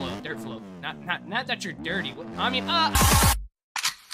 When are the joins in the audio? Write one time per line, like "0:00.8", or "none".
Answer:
0:02.9